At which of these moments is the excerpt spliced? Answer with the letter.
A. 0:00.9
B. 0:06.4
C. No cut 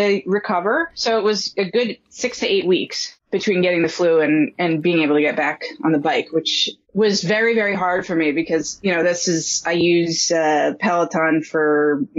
C